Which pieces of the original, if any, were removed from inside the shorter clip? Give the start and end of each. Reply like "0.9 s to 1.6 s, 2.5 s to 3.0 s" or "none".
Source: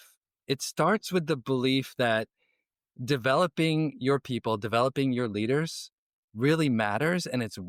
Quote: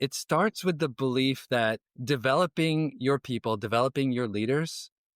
2.4 s to 2.9 s